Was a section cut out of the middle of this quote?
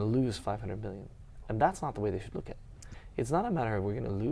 yes; 1 cut; at 2.9 s

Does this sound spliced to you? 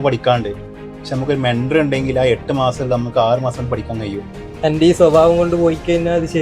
yes; 1 cut; at 4.4 s

